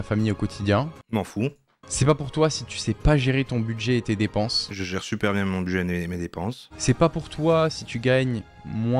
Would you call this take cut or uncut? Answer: uncut